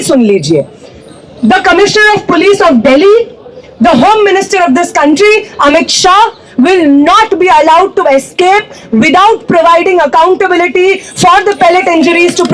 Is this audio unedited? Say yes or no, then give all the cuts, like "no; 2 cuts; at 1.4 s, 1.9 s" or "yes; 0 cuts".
yes; 0 cuts